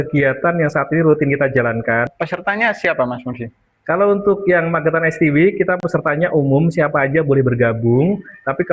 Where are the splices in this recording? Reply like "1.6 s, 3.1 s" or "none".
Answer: 2.1 s